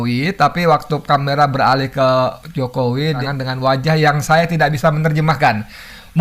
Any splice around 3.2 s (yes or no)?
yes